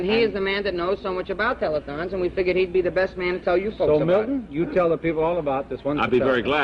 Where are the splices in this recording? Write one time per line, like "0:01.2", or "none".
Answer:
0:05.3